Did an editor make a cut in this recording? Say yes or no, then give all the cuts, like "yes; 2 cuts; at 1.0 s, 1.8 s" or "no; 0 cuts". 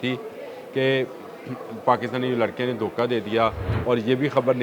yes; 1 cut; at 3.7 s